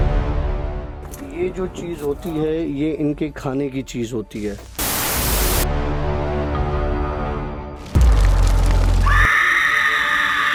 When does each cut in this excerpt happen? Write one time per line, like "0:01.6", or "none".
none